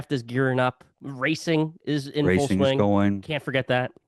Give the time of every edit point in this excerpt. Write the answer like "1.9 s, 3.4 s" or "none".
1.0 s